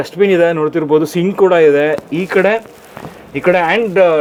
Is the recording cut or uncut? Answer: uncut